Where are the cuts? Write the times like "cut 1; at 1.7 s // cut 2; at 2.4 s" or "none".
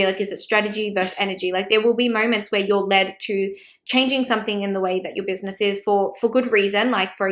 none